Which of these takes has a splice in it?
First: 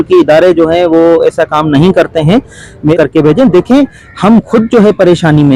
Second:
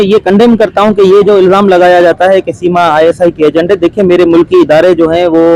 first; 1 cut; at 2.9 s

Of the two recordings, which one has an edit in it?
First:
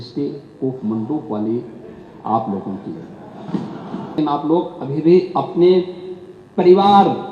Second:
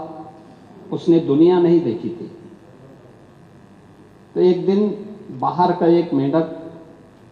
first; 1 cut; at 4.2 s

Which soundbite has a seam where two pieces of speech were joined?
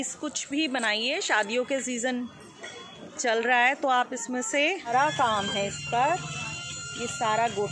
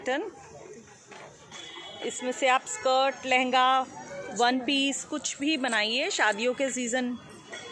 first; 1 cut; at 4.9 s

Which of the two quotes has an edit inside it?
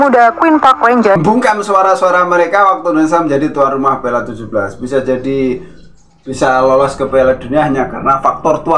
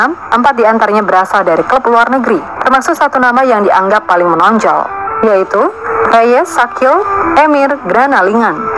first; 1 cut; at 1.2 s

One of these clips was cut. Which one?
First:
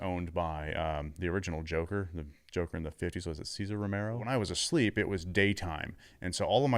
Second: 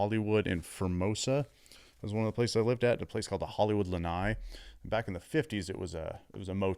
first; 1 cut; at 4.3 s

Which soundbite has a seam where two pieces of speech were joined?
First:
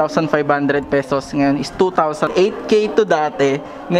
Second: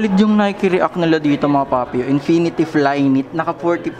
first; 1 cut; at 2.3 s

